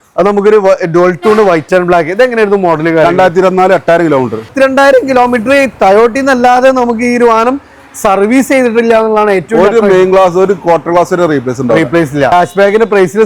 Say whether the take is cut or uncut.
cut